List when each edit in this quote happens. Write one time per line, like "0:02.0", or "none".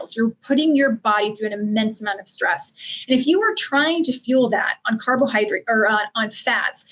none